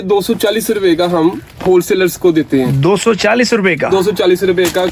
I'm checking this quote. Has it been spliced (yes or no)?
no